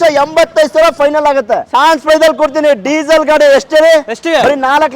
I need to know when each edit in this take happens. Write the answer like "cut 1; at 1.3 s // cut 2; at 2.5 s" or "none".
cut 1; at 1.7 s